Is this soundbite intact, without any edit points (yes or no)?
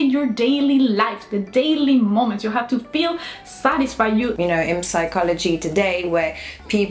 no